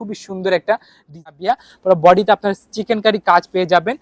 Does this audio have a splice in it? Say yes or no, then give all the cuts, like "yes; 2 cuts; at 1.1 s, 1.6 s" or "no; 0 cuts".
yes; 1 cut; at 1.3 s